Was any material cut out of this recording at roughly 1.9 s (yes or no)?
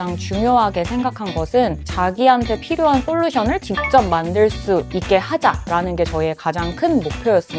yes